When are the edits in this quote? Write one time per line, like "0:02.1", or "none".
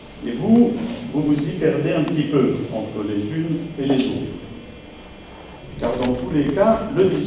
0:02.0